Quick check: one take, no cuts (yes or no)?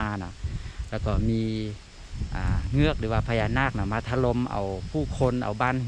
yes